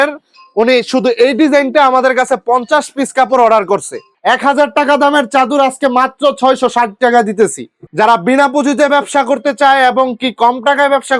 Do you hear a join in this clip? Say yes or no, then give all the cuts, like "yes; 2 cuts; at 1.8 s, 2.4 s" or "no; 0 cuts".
yes; 2 cuts; at 4.0 s, 7.7 s